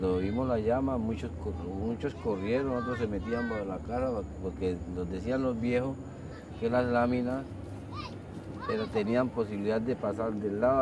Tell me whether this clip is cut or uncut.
uncut